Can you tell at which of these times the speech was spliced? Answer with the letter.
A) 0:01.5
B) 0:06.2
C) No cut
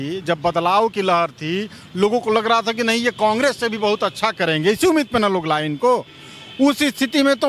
C